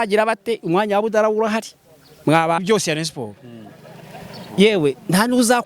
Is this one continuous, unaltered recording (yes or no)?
no